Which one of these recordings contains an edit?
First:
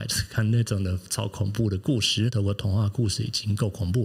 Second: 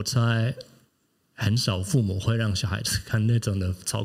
first; 1 cut; at 2.3 s

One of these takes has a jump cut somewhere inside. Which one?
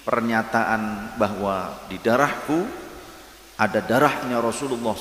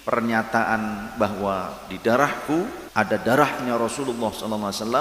second; 1 cut; at 2.8 s

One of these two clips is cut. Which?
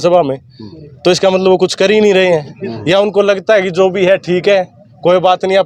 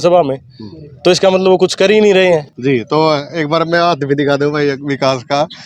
second; 1 cut; at 2.5 s

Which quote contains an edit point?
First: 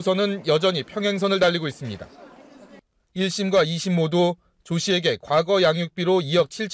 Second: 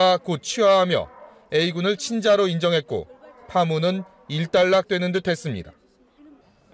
second; 1 cut; at 4.9 s

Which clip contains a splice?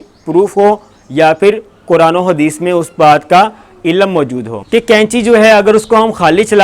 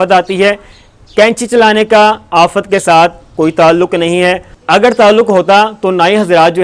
first; 1 cut; at 4.6 s

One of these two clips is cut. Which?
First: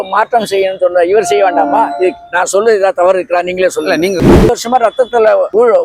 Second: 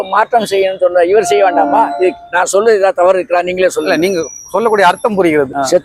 first; 1 cut; at 4.5 s

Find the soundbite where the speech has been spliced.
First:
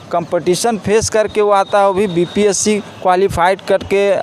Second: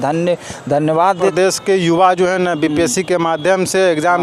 second; 1 cut; at 1.2 s

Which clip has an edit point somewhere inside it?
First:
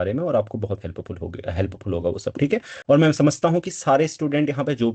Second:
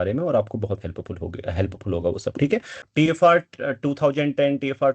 second; 1 cut; at 2.7 s

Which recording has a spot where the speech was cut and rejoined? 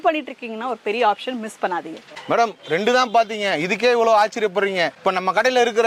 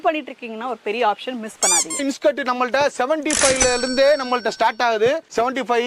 second; 1 cut; at 2.0 s

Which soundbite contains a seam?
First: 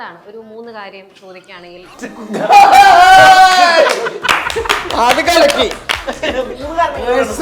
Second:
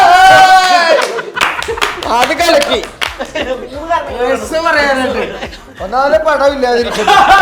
first; 1 cut; at 1.9 s

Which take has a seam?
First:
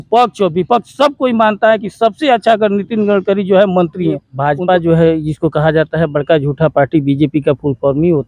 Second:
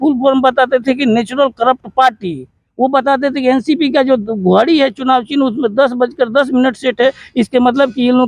first; 1 cut; at 4.3 s

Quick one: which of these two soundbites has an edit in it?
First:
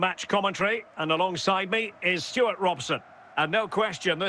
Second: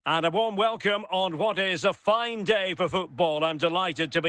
first; 1 cut; at 3.2 s

